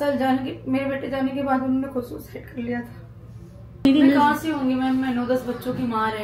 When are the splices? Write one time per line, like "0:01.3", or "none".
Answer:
0:03.8